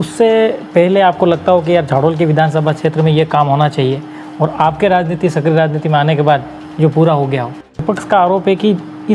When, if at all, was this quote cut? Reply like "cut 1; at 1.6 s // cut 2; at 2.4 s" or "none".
cut 1; at 7.8 s